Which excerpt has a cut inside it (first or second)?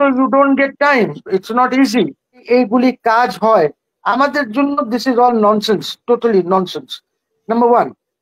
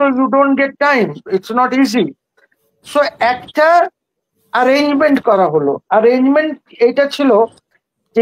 first